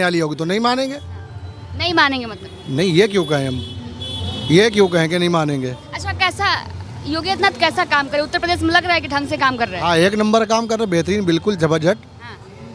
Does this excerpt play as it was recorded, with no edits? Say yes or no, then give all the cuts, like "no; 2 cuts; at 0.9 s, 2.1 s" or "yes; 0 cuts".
yes; 0 cuts